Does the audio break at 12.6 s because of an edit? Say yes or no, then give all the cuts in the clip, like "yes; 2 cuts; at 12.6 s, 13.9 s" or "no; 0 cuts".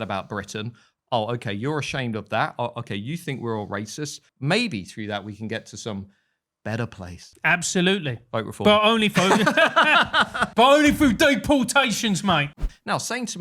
yes; 3 cuts; at 4.3 s, 7.3 s, 12.6 s